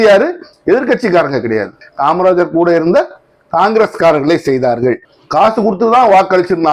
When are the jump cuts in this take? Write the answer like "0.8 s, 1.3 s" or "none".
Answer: 5.1 s